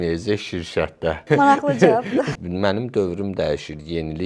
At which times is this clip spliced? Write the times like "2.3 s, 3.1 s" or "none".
1.2 s, 2.3 s